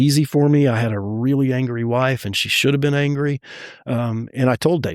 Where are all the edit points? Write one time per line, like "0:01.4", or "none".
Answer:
none